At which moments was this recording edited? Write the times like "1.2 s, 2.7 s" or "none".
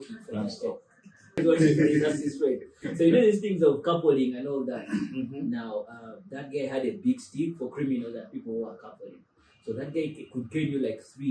1.4 s